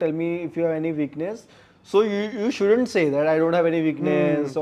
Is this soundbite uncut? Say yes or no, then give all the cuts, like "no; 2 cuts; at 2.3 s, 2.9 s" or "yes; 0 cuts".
yes; 0 cuts